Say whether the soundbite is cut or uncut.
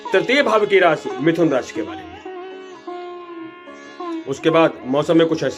uncut